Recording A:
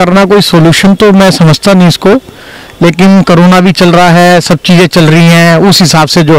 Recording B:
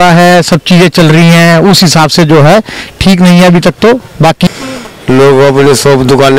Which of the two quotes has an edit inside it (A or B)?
B